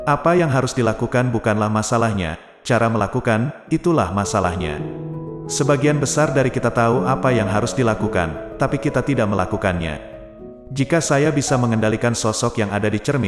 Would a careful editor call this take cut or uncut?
uncut